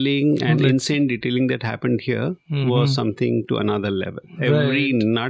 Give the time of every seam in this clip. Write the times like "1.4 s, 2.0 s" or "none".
none